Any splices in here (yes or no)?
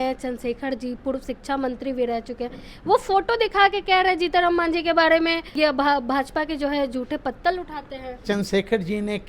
yes